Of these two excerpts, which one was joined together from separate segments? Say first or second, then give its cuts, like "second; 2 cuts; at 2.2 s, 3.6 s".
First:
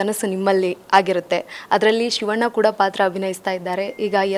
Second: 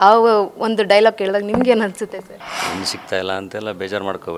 second; 1 cut; at 2.5 s